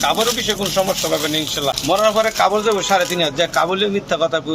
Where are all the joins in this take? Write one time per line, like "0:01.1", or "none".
0:01.8